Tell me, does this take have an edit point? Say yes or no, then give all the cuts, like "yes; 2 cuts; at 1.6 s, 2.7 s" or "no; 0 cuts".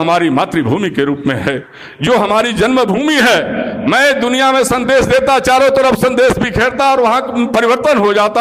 no; 0 cuts